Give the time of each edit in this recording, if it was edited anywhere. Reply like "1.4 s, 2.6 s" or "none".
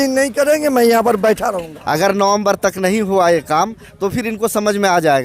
1.7 s

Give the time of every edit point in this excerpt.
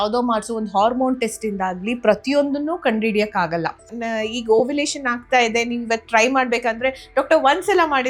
4.0 s

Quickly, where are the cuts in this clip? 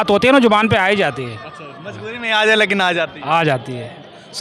none

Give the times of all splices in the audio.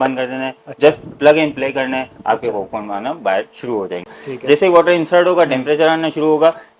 4.1 s

